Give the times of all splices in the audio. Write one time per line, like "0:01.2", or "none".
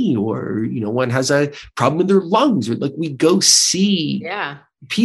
none